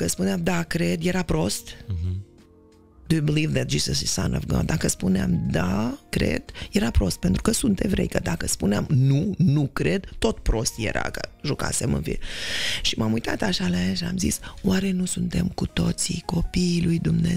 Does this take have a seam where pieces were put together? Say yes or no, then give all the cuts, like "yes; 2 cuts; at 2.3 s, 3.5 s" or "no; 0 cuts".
no; 0 cuts